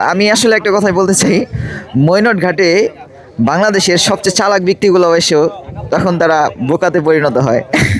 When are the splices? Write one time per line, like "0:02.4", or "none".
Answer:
none